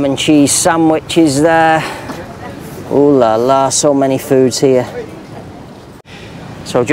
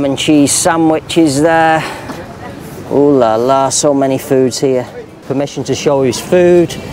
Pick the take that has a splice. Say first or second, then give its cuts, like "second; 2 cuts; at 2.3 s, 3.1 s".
second; 1 cut; at 5.2 s